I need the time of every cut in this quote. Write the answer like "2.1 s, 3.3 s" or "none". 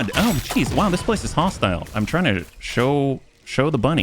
1.9 s

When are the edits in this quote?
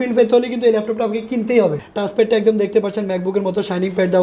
1.8 s

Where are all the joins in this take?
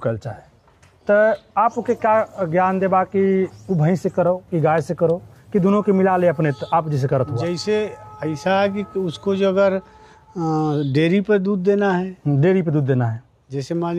none

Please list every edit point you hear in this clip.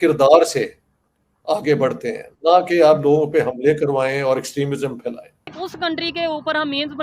5.5 s

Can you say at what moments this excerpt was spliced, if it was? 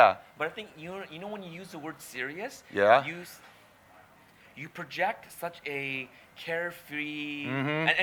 none

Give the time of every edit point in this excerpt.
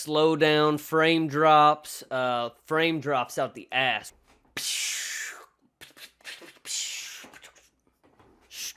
4.1 s

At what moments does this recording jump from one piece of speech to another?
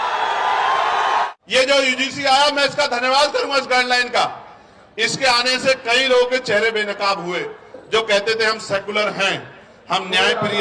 1.3 s

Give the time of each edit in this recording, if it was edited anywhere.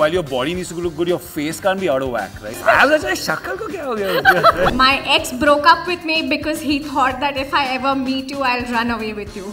2.6 s, 4.7 s

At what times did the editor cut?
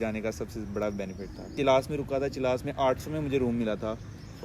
1.5 s

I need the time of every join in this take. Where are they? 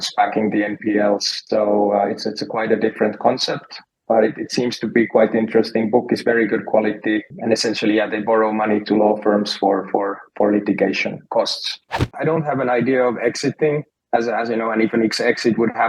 1.3 s, 7.3 s, 12.2 s

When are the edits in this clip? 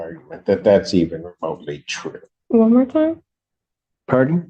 2.3 s

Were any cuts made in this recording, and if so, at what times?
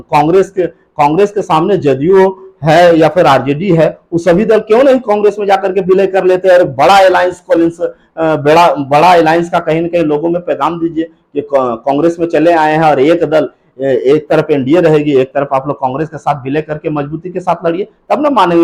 none

